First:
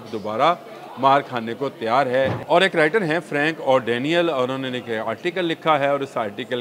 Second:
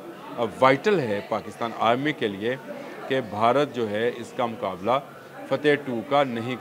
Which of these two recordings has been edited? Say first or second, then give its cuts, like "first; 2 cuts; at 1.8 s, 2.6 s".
first; 1 cut; at 2.4 s